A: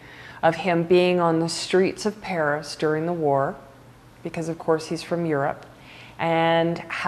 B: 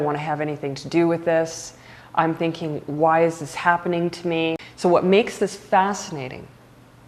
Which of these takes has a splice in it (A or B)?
B